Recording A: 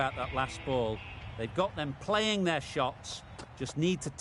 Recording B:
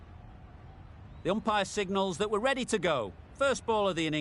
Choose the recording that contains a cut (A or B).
B